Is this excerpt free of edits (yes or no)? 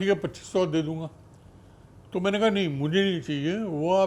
yes